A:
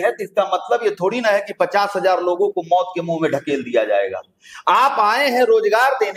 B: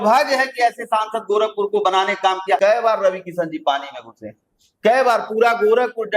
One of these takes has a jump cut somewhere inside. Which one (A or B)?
B